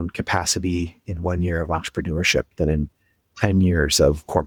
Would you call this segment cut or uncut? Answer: uncut